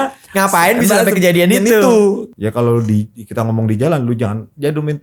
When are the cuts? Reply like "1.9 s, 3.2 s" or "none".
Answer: 2.3 s